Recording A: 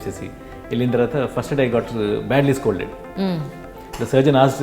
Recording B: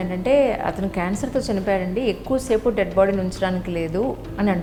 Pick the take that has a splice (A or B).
A